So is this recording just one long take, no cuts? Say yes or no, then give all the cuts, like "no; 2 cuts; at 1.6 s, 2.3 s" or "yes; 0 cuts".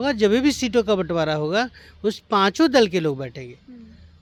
yes; 0 cuts